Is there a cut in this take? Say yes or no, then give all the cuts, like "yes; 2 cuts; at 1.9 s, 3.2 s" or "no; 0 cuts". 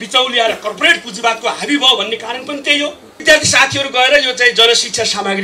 yes; 1 cut; at 3.2 s